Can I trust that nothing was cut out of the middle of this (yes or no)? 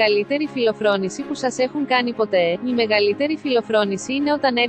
yes